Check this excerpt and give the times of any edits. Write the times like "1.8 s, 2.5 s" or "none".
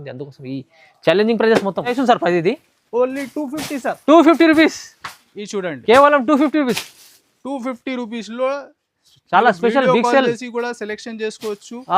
2.0 s